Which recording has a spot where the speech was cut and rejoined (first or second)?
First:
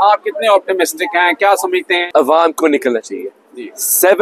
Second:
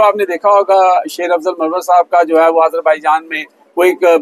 first